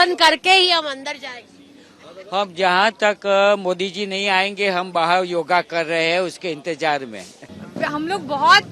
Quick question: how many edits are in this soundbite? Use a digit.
1